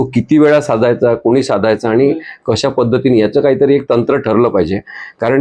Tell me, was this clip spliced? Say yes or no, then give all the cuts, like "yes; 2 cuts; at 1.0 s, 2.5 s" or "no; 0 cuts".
no; 0 cuts